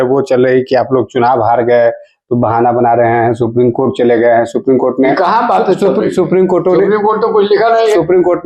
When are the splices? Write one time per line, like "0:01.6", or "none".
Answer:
none